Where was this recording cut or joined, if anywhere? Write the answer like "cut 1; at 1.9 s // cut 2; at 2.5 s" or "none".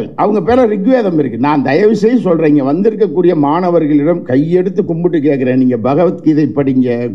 none